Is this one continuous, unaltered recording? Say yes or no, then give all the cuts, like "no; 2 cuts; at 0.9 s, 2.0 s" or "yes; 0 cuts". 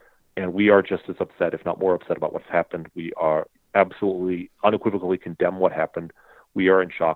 yes; 0 cuts